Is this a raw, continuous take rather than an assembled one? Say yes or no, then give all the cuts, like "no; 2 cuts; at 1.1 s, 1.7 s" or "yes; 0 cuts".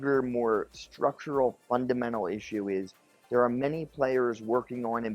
yes; 0 cuts